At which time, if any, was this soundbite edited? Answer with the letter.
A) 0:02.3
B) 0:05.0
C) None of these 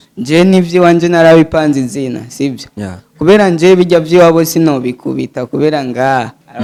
C